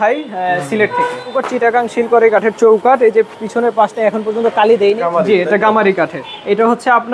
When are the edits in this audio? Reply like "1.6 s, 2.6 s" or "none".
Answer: 1.4 s, 5.0 s